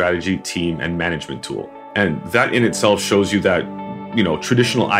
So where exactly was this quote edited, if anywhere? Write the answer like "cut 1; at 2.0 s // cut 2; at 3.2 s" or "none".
cut 1; at 1.8 s